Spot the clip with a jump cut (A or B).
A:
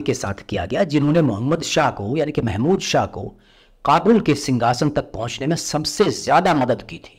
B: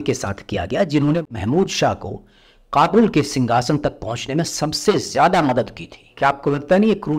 B